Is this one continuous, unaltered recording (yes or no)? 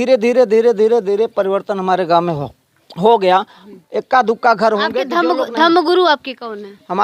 yes